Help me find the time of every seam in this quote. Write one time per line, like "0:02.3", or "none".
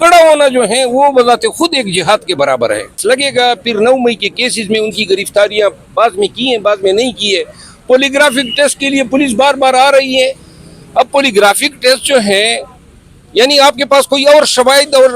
0:03.0